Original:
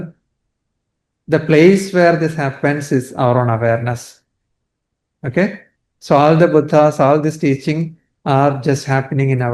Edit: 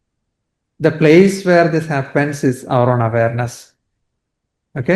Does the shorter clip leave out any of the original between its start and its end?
no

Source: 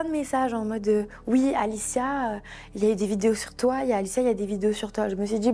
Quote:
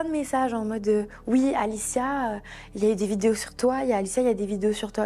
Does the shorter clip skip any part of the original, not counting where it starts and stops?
no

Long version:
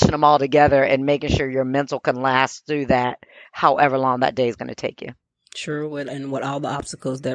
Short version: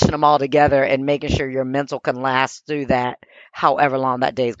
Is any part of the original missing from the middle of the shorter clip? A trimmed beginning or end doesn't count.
no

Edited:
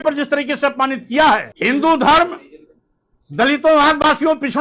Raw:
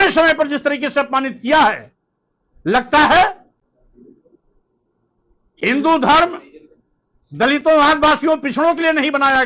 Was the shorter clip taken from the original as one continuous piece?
no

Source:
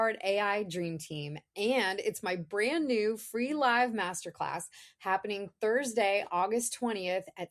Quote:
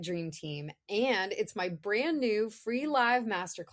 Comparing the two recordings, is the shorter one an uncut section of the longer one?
yes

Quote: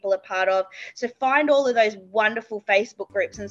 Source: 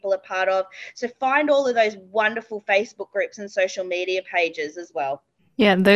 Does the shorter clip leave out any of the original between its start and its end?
no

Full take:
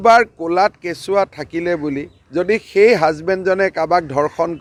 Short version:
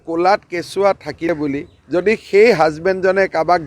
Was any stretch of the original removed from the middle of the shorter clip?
yes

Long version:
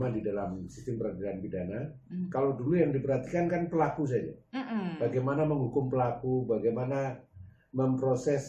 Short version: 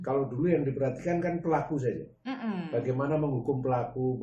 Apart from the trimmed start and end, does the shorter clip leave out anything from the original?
no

